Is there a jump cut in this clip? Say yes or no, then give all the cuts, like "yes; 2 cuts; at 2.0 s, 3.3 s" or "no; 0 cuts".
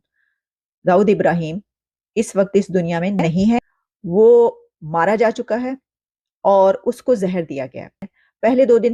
no; 0 cuts